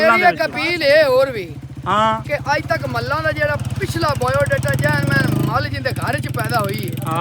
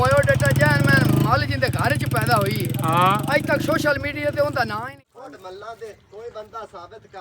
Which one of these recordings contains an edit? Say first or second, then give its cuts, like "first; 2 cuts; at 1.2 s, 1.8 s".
second; 1 cut; at 4.9 s